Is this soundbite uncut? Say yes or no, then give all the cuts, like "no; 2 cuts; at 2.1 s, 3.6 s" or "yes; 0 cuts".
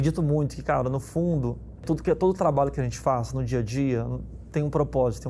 no; 1 cut; at 1.8 s